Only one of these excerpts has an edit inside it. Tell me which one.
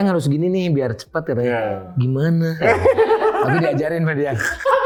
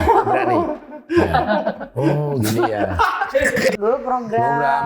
second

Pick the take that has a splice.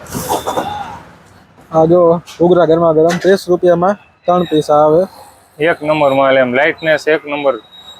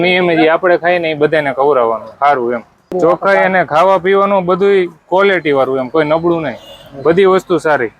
second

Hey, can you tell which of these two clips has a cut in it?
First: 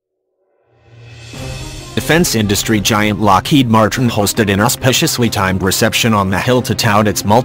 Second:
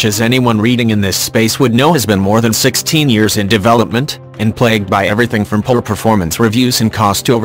second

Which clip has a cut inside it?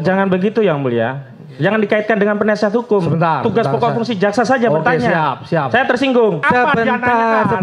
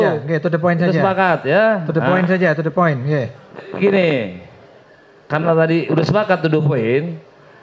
first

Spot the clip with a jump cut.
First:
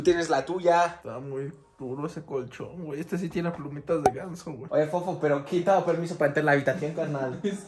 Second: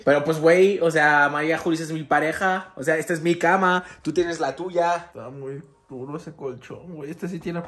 first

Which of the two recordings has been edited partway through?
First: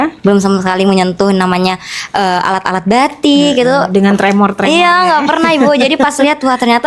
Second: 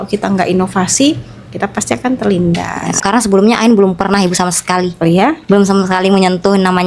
second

